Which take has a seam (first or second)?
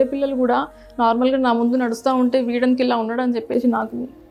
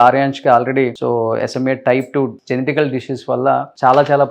second